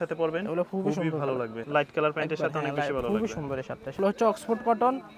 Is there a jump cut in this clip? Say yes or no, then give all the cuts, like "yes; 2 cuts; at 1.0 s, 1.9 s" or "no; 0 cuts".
yes; 2 cuts; at 1.6 s, 3.9 s